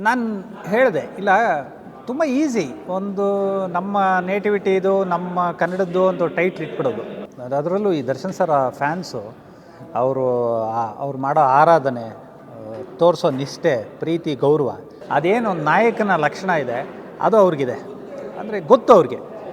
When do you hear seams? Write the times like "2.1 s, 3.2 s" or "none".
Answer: 7.3 s, 14.9 s